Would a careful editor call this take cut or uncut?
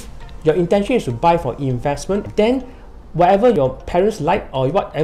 cut